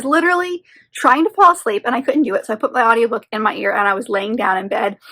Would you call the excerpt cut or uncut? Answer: uncut